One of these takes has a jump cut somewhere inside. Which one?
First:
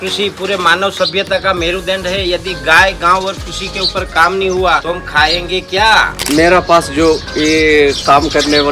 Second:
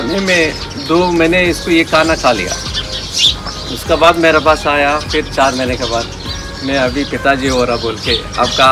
first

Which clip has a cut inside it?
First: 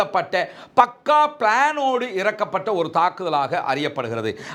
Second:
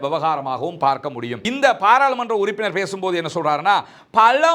second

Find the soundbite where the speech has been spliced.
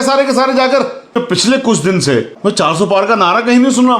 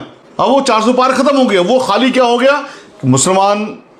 first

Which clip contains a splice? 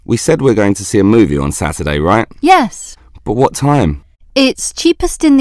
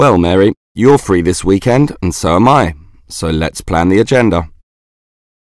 first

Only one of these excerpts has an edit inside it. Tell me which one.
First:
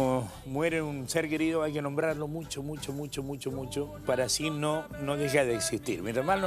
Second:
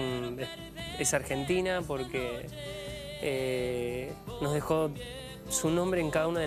first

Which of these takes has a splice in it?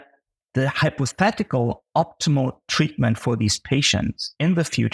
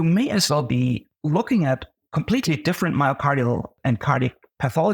second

